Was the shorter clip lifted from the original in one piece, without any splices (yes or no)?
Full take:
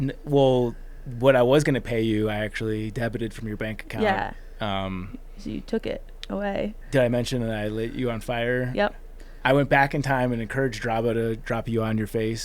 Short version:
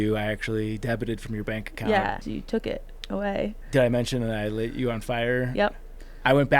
no